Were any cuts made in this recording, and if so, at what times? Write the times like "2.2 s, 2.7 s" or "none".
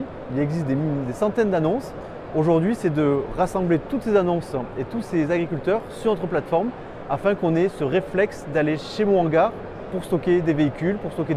none